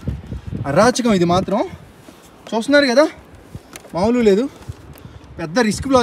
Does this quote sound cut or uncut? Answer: uncut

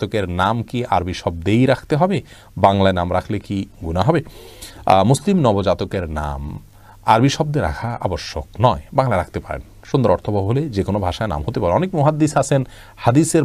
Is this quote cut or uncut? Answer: uncut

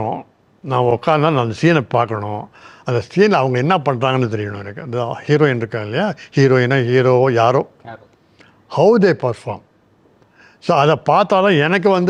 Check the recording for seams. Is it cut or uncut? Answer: uncut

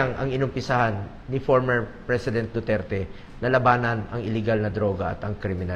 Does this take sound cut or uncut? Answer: uncut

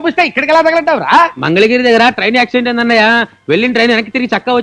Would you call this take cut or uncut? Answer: uncut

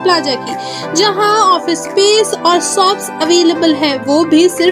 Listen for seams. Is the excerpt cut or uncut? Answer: uncut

